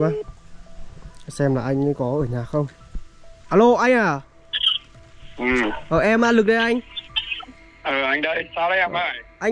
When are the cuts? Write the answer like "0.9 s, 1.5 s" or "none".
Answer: 3.3 s